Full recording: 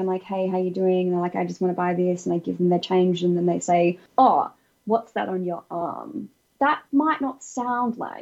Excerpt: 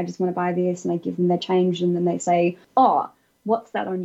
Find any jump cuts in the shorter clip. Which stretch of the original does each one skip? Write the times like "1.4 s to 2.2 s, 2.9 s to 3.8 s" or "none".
none